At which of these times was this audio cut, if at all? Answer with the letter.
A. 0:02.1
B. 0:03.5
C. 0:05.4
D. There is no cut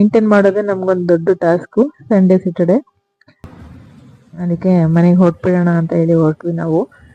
B